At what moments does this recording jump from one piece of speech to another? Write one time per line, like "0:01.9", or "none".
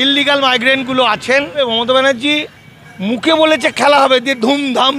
0:01.6